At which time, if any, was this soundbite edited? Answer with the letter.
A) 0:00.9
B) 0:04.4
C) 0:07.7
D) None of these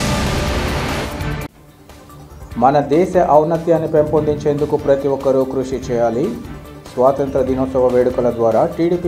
A